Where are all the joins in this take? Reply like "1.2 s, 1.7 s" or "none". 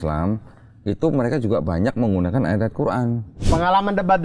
3.3 s